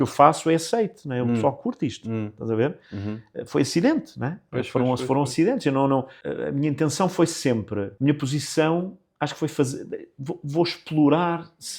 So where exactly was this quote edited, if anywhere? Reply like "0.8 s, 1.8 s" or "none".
6.2 s, 7.9 s